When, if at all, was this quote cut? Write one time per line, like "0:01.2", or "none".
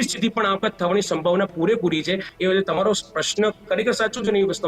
0:02.3